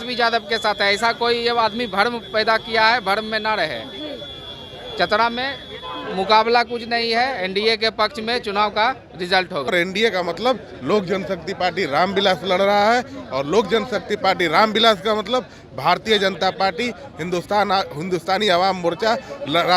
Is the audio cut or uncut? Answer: cut